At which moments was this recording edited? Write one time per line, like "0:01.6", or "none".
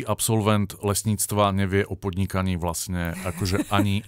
none